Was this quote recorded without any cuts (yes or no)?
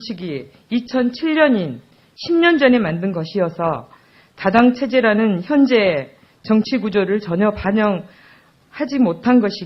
yes